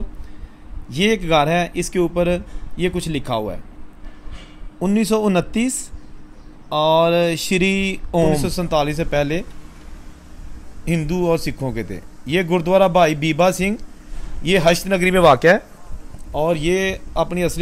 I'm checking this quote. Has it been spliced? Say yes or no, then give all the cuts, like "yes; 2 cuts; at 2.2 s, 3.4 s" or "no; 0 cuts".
yes; 1 cut; at 8.5 s